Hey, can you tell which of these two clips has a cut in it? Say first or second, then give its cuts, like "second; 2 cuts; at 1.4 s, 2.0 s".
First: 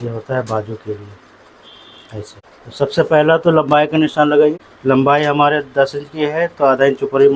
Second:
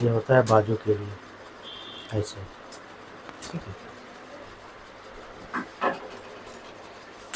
first; 2 cuts; at 2.4 s, 4.6 s